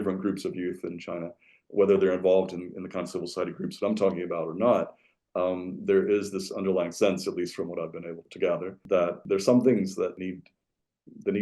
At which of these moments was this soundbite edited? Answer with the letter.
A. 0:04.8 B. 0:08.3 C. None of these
B